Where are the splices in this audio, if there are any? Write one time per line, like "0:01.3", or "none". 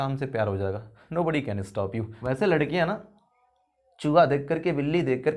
0:00.9
0:02.1